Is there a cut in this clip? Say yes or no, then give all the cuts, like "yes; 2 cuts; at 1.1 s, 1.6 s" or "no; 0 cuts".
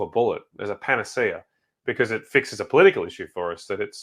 no; 0 cuts